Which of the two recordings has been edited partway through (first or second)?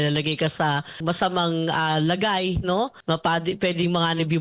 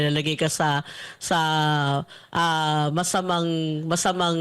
first